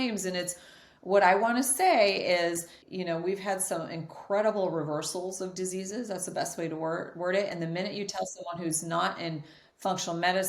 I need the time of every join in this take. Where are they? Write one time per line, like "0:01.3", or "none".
0:02.8